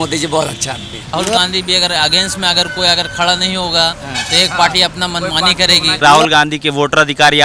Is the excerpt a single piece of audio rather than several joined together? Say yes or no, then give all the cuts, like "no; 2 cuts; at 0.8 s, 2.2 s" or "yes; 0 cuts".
no; 2 cuts; at 1.1 s, 6.0 s